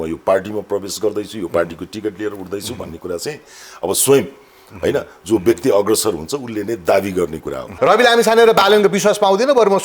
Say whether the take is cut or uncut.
cut